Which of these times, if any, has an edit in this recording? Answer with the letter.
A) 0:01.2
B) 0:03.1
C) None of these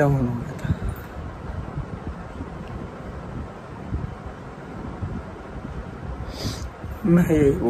C